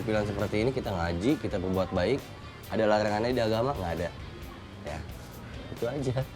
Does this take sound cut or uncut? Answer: uncut